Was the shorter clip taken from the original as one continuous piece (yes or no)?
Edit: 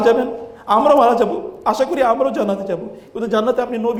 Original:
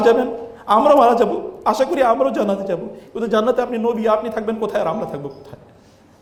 yes